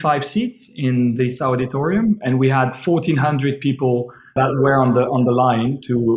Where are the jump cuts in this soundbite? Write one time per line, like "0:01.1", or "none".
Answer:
0:04.3